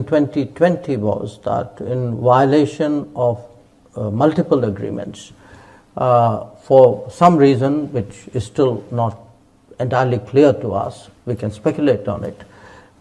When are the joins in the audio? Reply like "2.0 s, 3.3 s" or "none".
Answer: none